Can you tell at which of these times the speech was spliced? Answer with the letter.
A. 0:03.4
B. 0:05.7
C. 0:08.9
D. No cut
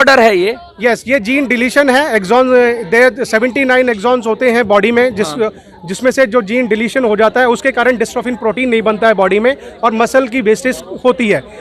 D